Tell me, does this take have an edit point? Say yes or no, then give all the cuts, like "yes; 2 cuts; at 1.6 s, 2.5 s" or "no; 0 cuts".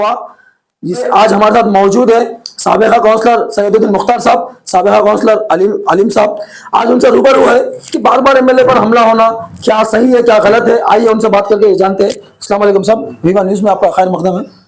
yes; 1 cut; at 1.0 s